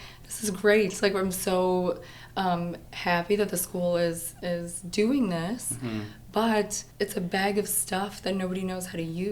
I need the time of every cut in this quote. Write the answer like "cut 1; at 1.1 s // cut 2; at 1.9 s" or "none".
cut 1; at 6.8 s